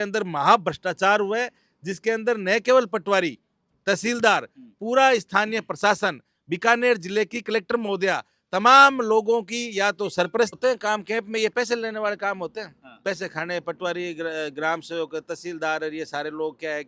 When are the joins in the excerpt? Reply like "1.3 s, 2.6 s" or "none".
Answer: 10.6 s